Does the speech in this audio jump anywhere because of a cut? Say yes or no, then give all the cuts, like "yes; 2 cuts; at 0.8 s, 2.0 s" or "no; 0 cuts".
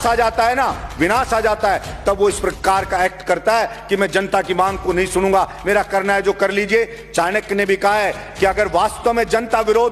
no; 0 cuts